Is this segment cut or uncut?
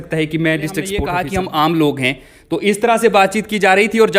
cut